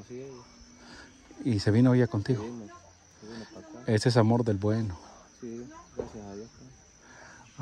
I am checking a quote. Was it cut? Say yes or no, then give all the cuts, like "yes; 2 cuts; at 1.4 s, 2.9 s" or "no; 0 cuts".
no; 0 cuts